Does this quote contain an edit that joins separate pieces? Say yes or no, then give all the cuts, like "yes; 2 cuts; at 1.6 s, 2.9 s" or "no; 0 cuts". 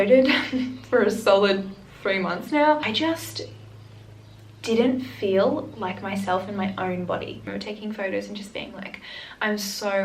yes; 2 cuts; at 2.8 s, 7.4 s